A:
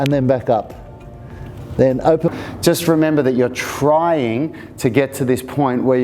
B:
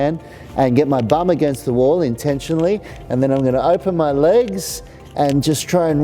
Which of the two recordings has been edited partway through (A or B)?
A